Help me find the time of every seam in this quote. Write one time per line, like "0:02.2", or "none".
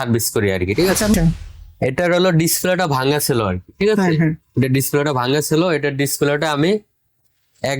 0:01.1